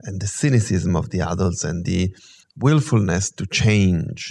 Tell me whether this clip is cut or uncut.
cut